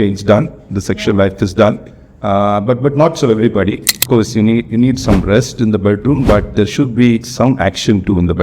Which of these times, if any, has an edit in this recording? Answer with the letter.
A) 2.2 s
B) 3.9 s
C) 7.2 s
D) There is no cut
B